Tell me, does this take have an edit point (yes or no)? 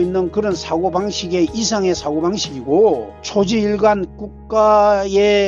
no